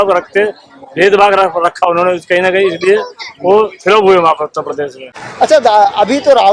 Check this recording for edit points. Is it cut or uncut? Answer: cut